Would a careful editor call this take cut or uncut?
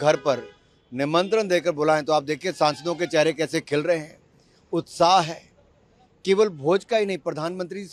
uncut